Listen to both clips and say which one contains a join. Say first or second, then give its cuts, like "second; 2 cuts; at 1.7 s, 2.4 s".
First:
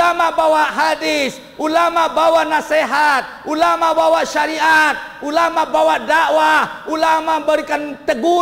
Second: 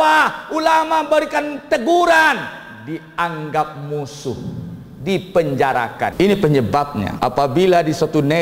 second; 2 cuts; at 6.1 s, 7.1 s